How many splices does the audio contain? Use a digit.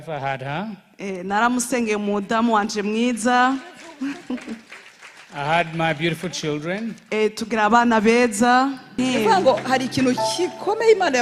1